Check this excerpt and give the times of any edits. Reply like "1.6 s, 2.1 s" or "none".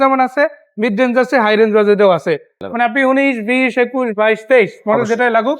2.6 s